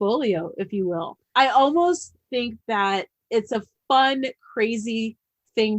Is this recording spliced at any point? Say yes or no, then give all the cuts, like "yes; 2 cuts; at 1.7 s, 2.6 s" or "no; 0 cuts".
yes; 2 cuts; at 1.2 s, 3.2 s